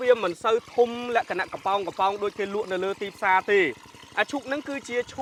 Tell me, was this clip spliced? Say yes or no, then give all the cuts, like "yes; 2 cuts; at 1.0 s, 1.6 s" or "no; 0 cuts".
no; 0 cuts